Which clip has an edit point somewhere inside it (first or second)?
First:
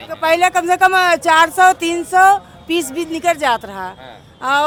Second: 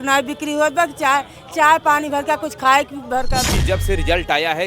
second